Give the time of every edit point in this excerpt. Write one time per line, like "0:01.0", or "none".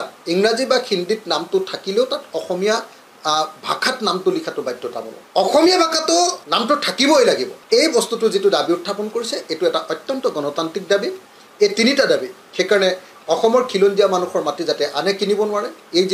0:05.1
0:06.5
0:07.5